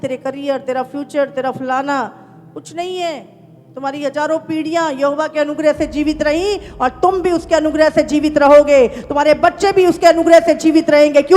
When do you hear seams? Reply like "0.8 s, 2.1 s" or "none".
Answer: none